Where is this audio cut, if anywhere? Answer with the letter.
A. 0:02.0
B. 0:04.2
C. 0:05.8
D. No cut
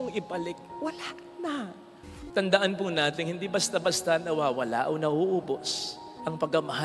A